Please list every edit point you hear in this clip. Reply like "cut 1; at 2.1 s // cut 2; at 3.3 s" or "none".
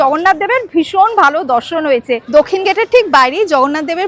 cut 1; at 2.2 s

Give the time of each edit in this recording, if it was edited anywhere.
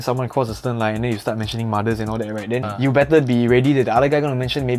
cut 1; at 2.7 s

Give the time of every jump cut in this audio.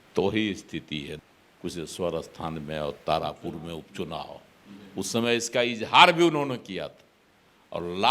cut 1; at 1.1 s

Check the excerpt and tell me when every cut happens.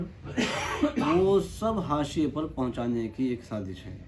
none

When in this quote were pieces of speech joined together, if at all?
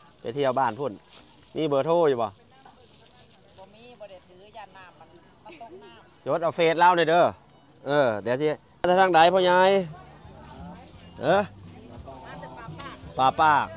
cut 1; at 8.8 s

